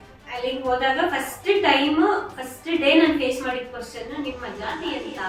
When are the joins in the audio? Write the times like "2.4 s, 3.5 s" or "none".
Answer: none